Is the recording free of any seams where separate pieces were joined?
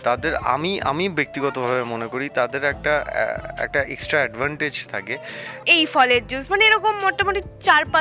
no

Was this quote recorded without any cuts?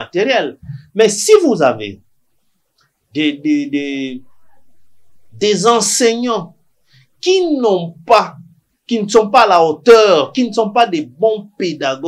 yes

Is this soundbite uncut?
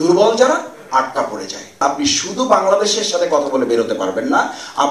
no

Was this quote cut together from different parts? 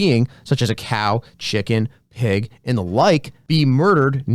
yes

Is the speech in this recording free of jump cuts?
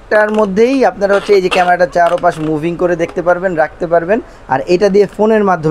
yes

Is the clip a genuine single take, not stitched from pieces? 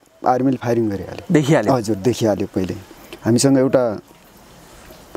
no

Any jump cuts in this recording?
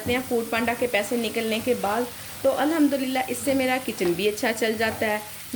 no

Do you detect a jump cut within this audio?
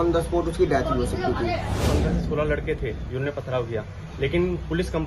yes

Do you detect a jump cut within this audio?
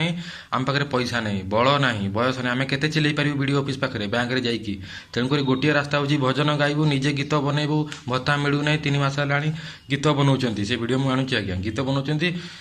no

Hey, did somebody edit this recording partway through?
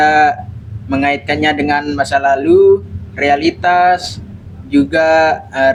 no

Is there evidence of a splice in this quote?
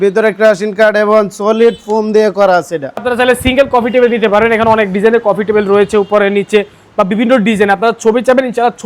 yes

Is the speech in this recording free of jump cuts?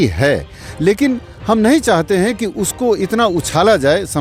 yes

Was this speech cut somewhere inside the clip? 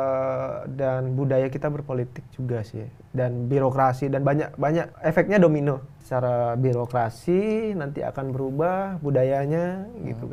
yes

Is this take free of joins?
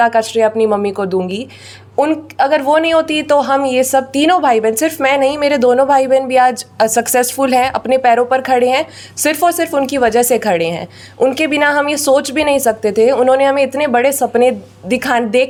yes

